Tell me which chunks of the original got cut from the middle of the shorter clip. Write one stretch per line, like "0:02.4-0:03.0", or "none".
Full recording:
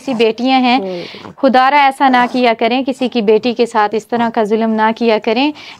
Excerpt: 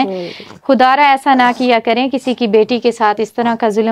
none